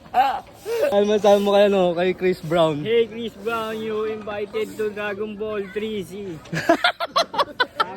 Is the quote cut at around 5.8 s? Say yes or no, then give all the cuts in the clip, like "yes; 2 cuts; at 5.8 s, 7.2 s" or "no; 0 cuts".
no; 1 cut; at 0.9 s